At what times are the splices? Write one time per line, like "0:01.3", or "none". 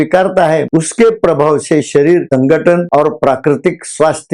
none

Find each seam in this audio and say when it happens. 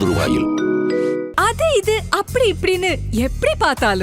0:01.3

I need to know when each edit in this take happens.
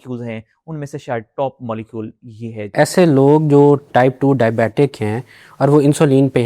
0:02.7
0:03.9

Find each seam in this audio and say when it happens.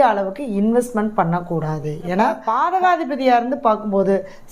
0:02.7

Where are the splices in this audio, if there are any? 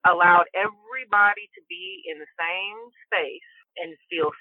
none

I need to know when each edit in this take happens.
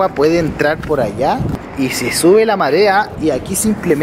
0:01.6
0:03.1

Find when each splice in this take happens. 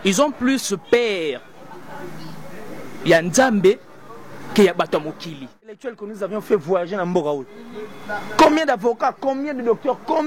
0:05.9

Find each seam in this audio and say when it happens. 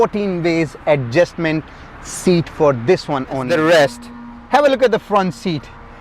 0:03.4

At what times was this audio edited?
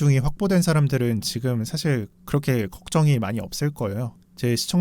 none

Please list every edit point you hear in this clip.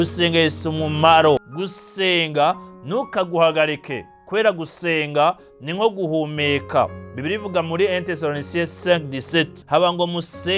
0:01.6
0:09.6

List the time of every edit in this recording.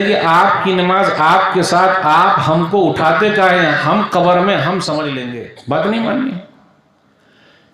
0:05.2

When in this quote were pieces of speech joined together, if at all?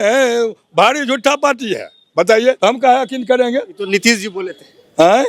0:02.6

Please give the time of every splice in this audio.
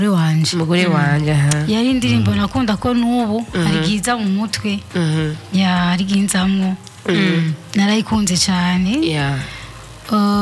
none

